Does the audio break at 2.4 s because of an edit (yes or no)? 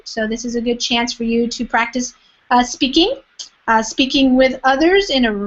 no